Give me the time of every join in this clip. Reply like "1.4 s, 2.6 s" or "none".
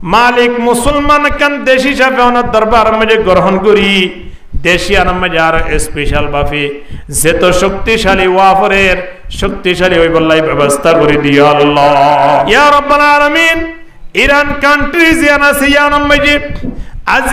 12.5 s

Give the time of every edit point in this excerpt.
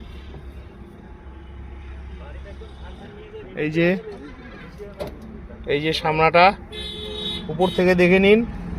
none

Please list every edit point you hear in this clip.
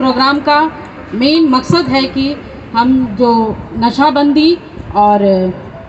none

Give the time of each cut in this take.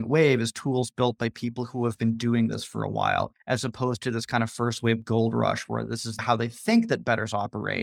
6.2 s

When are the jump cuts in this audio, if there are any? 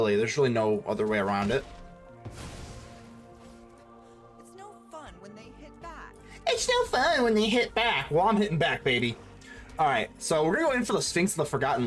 none

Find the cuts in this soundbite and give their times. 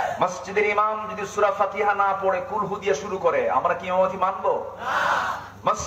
none

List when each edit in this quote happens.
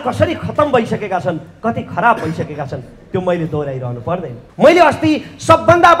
4.4 s

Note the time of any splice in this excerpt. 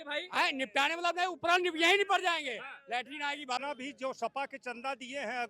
3.6 s

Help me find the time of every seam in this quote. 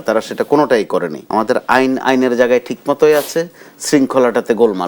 1.2 s

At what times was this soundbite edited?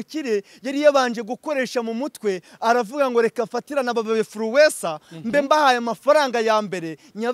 none

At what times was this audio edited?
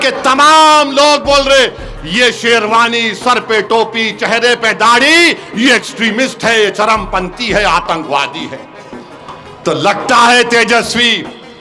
none

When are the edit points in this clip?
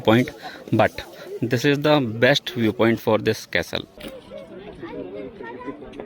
none

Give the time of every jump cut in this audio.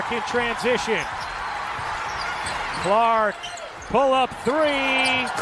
none

